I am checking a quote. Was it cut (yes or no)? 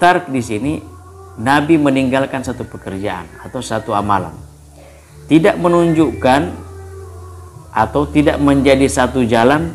no